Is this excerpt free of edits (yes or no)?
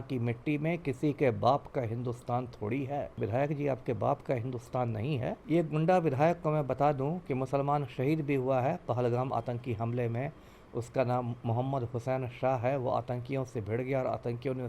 no